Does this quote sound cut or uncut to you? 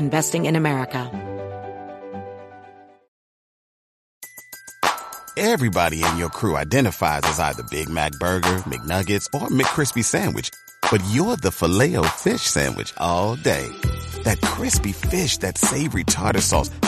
cut